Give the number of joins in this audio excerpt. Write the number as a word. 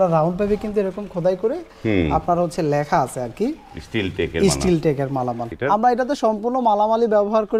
one